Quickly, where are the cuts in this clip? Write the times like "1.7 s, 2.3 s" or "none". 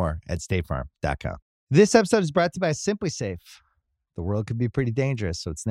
1.4 s